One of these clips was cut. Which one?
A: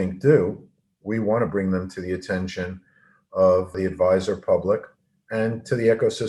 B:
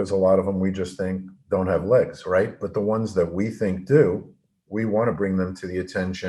A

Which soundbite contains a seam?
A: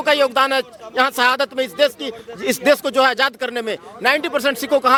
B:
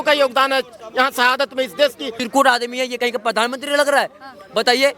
B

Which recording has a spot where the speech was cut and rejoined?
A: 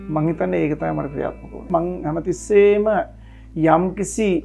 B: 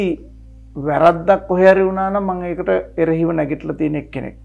A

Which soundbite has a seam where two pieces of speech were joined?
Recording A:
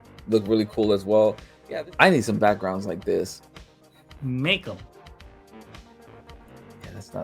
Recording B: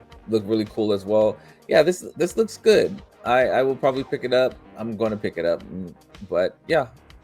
A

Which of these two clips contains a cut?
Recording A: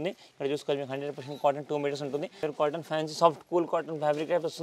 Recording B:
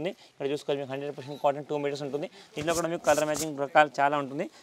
A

